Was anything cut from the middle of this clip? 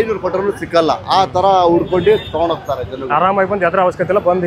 no; 0 cuts

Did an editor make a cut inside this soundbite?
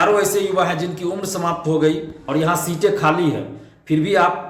yes; 1 cut; at 2.1 s

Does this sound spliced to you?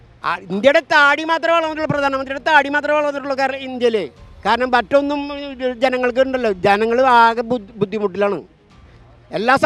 no; 0 cuts

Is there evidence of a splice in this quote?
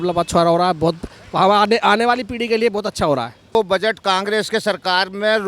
yes; 1 cut; at 3.5 s

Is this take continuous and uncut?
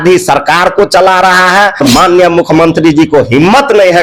no; 1 cut; at 1.8 s

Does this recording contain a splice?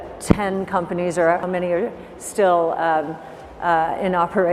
yes; 1 cut; at 1.4 s

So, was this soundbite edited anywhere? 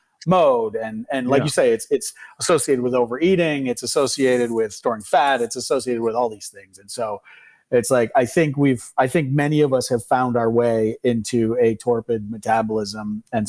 no; 0 cuts

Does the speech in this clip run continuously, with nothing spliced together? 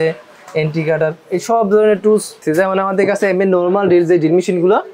no; 1 cut; at 2.4 s

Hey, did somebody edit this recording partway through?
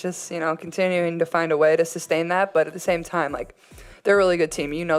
no; 0 cuts

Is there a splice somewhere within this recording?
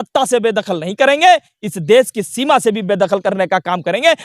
no; 0 cuts

